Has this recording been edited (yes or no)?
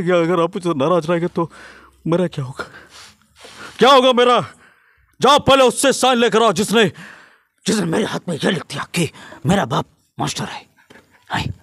no